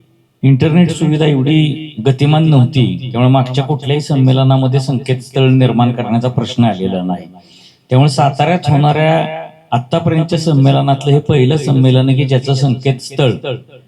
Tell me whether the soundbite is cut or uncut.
uncut